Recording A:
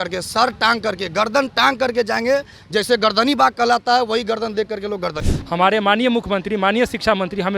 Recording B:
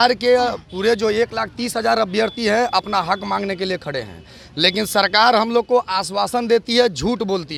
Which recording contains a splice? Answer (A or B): A